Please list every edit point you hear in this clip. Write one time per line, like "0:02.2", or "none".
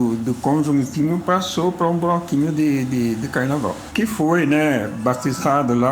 0:03.8